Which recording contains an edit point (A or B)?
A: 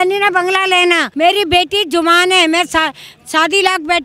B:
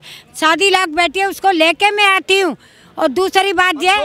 A